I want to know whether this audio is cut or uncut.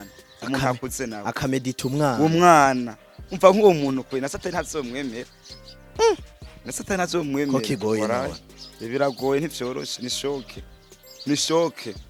uncut